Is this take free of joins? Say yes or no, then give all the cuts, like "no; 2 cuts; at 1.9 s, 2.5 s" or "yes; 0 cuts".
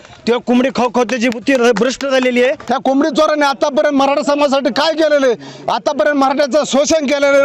no; 1 cut; at 2.6 s